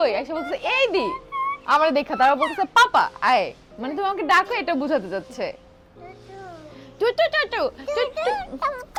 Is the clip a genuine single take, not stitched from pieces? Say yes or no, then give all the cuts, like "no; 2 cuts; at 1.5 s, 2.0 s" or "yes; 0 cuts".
yes; 0 cuts